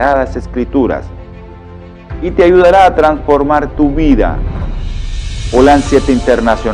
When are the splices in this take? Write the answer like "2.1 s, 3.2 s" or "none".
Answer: none